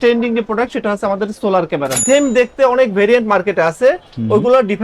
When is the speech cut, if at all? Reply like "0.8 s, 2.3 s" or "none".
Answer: 2.0 s